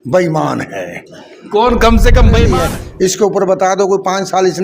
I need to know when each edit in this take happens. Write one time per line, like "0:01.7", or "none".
0:02.5